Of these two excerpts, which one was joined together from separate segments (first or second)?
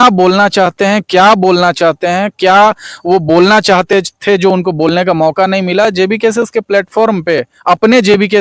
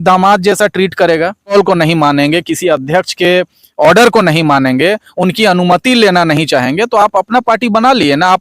second